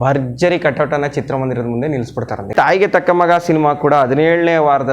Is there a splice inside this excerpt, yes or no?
yes